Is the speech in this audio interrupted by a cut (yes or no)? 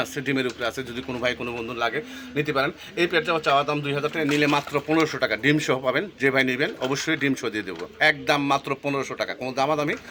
no